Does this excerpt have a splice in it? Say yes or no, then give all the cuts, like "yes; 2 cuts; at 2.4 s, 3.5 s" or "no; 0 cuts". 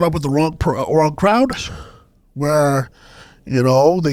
no; 0 cuts